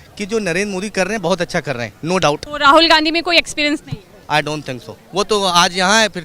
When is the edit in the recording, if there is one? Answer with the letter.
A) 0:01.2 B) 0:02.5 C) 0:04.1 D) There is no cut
B